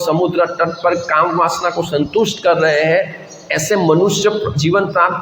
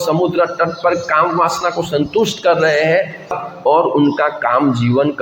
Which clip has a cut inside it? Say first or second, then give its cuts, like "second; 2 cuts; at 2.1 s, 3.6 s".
second; 1 cut; at 3.4 s